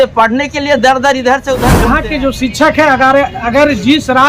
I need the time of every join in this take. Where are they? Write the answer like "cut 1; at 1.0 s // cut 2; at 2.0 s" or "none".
cut 1; at 1.8 s